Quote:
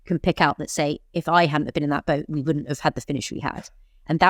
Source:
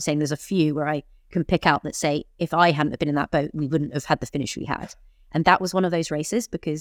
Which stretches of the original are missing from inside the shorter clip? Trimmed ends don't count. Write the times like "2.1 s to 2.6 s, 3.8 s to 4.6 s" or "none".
none